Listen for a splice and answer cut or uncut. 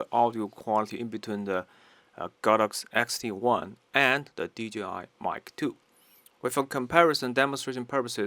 uncut